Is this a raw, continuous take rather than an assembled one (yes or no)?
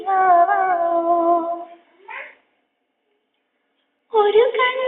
yes